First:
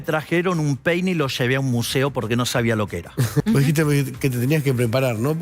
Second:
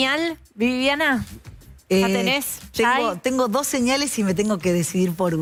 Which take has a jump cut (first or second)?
first